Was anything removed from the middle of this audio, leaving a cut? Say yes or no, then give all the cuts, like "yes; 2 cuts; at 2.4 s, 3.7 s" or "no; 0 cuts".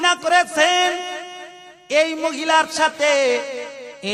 no; 0 cuts